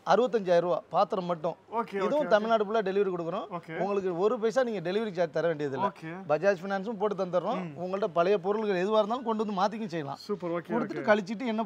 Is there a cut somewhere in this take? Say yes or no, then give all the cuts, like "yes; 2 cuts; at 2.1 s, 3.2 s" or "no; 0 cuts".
no; 0 cuts